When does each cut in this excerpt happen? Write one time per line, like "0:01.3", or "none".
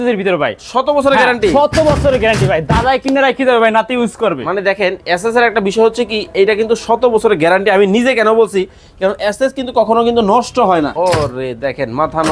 0:10.9